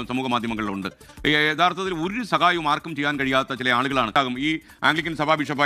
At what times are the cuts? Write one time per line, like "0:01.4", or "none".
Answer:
0:04.1